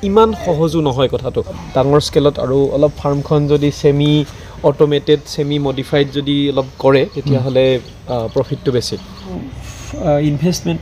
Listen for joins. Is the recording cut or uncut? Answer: cut